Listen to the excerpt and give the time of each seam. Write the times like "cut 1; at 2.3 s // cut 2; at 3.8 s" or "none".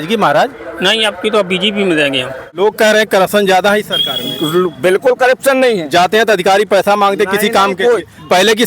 cut 1; at 2.5 s